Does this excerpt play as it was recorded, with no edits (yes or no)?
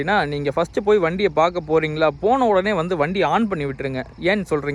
yes